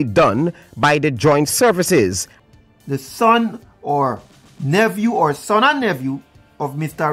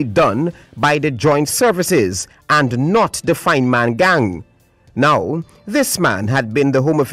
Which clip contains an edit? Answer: first; 1 cut; at 2.3 s

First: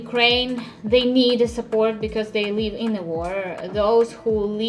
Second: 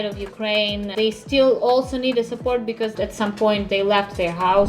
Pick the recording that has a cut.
second; 2 cuts; at 0.9 s, 2.9 s

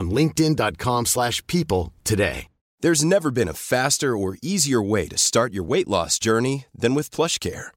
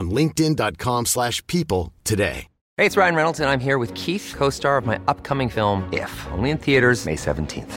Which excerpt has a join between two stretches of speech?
second; 1 cut; at 2.6 s

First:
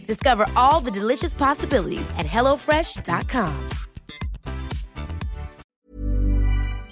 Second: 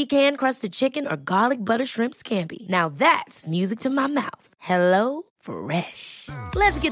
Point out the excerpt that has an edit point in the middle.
first; 1 cut; at 5.6 s

